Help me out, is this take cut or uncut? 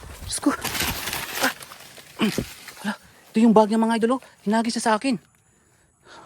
cut